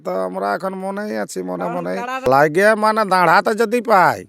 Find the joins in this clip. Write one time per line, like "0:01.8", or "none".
0:02.3